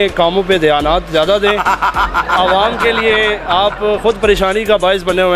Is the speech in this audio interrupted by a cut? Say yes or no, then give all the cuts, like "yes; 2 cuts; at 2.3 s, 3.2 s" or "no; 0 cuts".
no; 0 cuts